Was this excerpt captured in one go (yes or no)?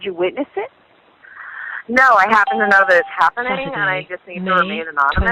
yes